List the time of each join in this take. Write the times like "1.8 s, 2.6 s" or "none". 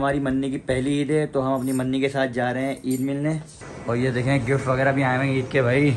3.6 s